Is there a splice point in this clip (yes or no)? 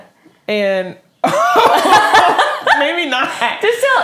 no